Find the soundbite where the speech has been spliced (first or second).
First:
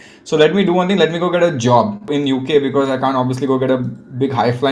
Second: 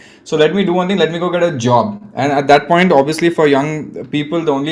first